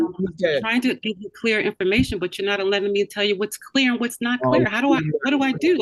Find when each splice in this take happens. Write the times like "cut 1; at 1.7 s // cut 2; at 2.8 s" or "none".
none